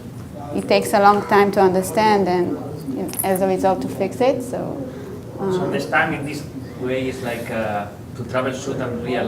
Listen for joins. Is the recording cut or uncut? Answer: cut